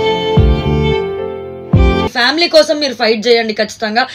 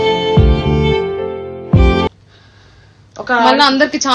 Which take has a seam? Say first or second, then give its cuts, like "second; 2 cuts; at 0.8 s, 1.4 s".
first; 1 cut; at 2.2 s